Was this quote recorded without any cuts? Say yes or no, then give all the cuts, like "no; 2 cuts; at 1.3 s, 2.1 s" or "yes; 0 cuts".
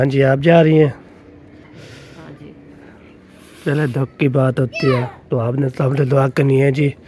yes; 0 cuts